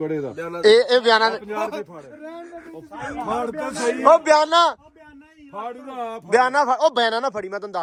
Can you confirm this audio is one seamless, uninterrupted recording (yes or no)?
yes